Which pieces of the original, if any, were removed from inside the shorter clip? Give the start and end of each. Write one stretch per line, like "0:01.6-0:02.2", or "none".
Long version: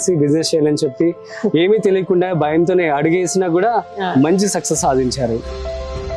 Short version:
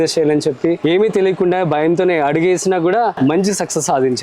0:01.2-0:01.5
0:03.9-0:04.1